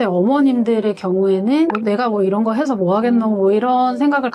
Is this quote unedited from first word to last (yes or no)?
yes